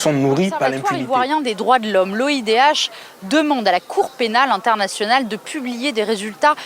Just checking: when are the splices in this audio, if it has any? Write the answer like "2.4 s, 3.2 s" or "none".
1.0 s